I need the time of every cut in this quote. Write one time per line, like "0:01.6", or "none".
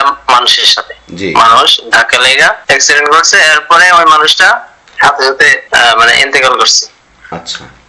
none